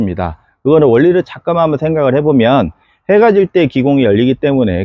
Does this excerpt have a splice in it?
no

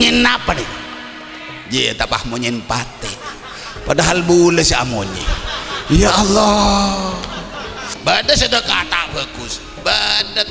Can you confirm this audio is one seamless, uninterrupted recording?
no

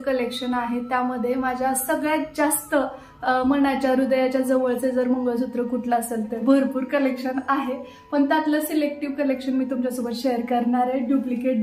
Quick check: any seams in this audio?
yes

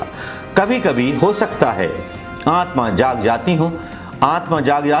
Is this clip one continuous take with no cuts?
yes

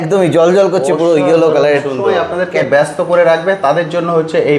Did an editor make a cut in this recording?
yes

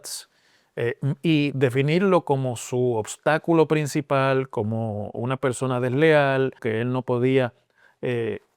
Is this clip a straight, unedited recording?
no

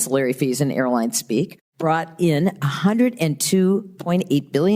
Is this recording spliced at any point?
yes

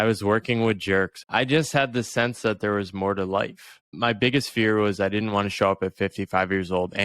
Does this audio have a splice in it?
yes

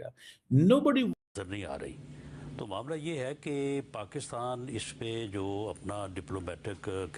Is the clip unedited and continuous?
yes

